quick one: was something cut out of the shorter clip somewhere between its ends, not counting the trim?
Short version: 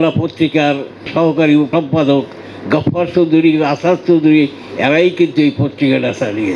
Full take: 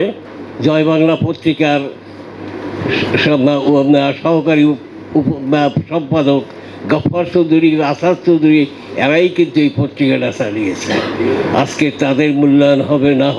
yes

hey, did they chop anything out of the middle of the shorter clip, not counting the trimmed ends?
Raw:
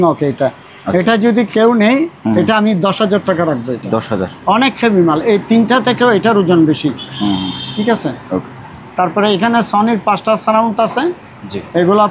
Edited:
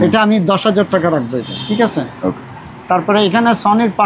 yes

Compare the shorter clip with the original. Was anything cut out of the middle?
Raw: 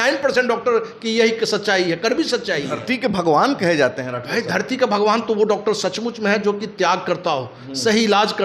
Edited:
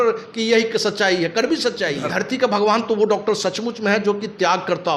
yes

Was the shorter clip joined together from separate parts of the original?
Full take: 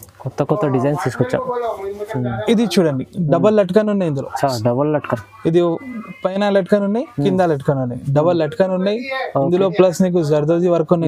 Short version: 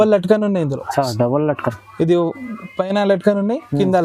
no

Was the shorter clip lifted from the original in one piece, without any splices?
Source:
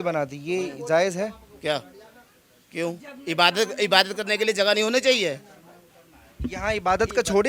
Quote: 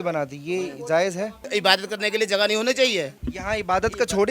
no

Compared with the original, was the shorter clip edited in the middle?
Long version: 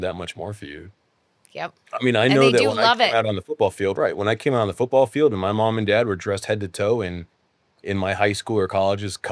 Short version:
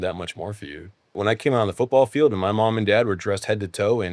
yes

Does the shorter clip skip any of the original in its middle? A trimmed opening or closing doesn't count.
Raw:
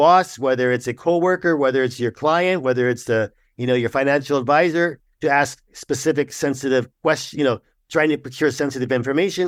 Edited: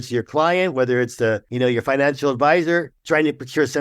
yes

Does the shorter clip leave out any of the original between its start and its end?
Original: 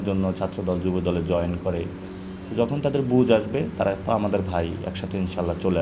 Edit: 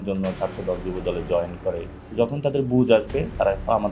yes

